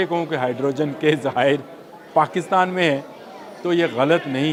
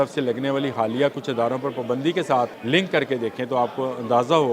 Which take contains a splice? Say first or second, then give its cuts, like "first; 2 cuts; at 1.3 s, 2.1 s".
second; 1 cut; at 2.6 s